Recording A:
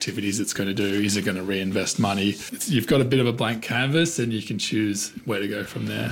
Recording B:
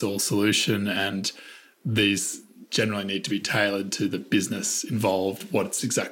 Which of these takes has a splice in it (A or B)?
A